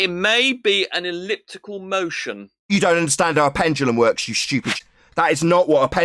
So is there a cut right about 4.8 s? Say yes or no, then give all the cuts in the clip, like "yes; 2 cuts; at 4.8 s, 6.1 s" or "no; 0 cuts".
yes; 1 cut; at 4.8 s